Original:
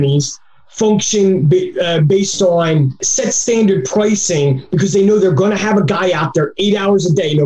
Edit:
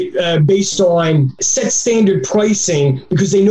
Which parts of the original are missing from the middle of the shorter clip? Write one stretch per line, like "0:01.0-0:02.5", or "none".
none